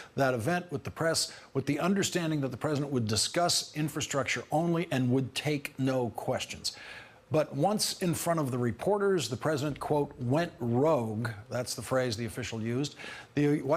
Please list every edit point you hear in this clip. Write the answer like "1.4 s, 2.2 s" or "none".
none